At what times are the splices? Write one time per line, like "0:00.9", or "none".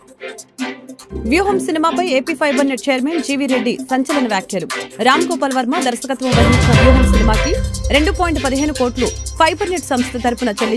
0:00.9

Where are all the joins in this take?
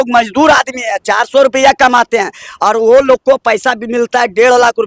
none

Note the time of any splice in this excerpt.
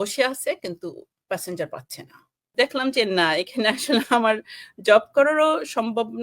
0:02.5

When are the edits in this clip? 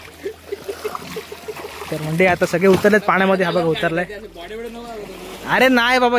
none

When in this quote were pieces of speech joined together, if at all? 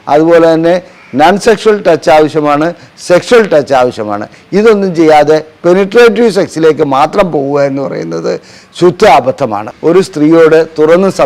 0:09.7

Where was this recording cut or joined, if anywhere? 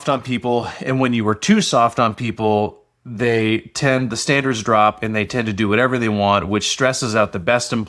none

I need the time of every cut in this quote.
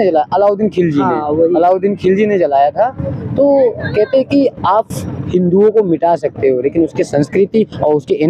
none

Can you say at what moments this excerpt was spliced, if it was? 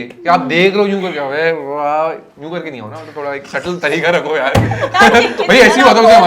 none

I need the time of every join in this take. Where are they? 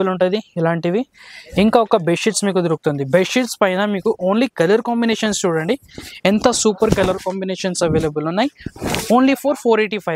none

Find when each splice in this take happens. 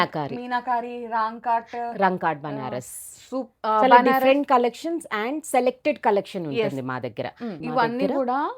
0:07.6

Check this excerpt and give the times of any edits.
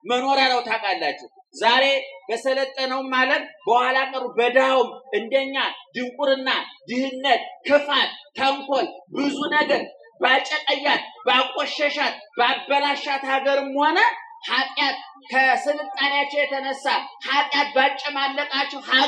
none

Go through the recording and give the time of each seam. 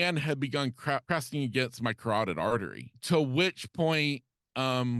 0:01.0
0:02.9

